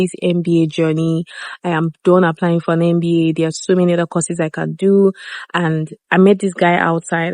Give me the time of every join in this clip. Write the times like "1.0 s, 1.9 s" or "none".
none